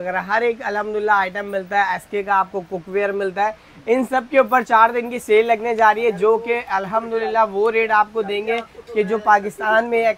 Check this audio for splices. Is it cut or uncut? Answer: uncut